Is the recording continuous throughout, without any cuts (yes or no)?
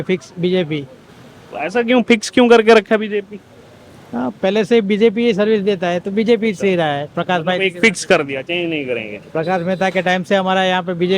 yes